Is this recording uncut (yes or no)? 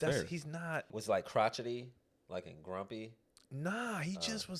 no